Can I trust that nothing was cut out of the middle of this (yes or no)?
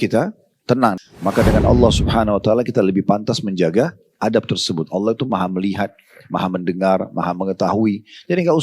no